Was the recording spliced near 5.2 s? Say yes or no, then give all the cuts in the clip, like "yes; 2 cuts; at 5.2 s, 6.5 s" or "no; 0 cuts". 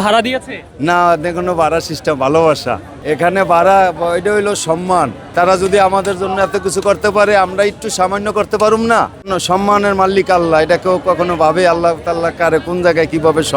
yes; 3 cuts; at 2.9 s, 5.2 s, 9.3 s